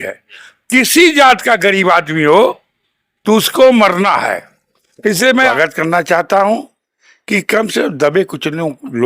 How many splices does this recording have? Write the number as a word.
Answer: one